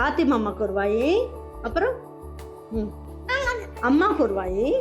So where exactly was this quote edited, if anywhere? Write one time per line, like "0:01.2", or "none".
none